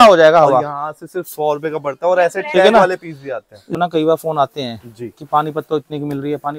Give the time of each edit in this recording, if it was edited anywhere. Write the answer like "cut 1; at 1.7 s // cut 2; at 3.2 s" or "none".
cut 1; at 3.8 s